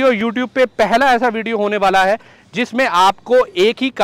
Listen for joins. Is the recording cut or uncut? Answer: uncut